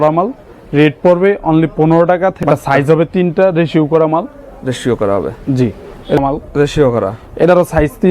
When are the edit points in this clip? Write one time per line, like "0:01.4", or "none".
0:02.4
0:06.2